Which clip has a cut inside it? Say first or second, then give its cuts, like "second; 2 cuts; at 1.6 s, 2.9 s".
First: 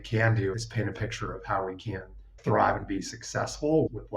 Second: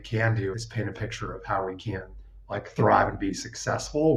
first; 1 cut; at 2.4 s